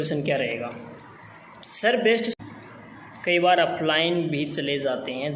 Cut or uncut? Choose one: cut